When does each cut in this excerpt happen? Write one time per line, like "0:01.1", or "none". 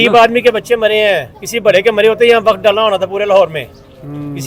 none